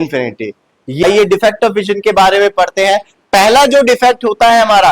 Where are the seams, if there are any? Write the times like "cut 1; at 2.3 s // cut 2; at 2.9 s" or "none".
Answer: cut 1; at 1.0 s

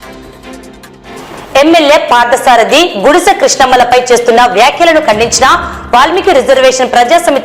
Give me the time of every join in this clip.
cut 1; at 1.2 s

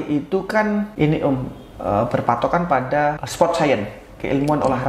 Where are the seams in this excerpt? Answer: cut 1; at 0.9 s // cut 2; at 3.2 s

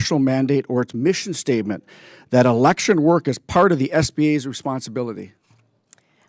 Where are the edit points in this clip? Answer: none

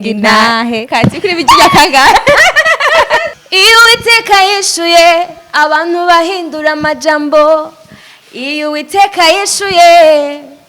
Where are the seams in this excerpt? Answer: cut 1; at 3.4 s

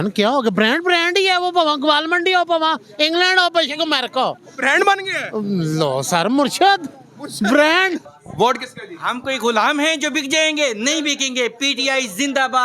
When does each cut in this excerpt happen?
cut 1; at 8.1 s

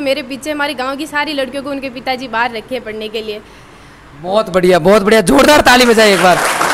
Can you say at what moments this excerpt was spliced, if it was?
none

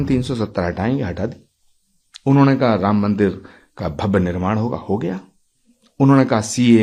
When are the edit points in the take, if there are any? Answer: none

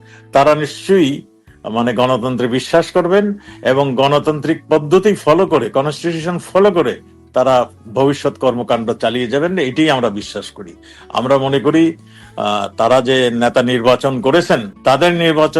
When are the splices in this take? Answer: cut 1; at 14.7 s

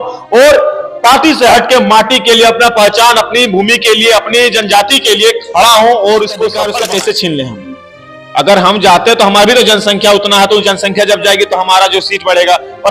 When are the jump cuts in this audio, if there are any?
cut 1; at 6.7 s

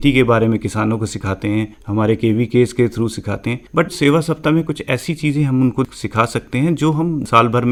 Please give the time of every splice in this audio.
none

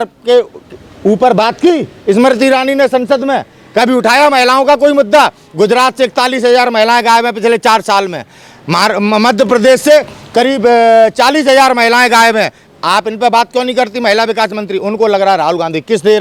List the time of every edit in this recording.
none

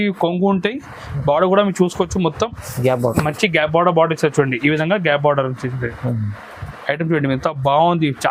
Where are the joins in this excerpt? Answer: none

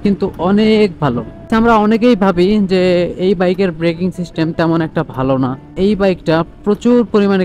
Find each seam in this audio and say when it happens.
cut 1; at 1.5 s // cut 2; at 5.7 s

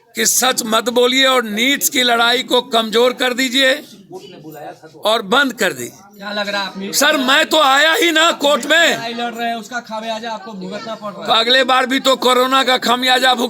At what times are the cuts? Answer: none

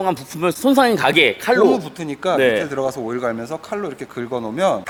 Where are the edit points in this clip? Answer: none

